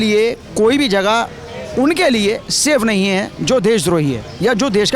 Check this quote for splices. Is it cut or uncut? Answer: uncut